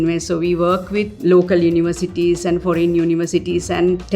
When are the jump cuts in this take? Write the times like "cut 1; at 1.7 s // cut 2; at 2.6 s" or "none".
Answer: cut 1; at 1.2 s